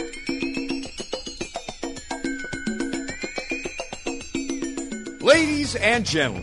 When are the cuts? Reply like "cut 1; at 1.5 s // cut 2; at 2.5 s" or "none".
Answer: cut 1; at 5.2 s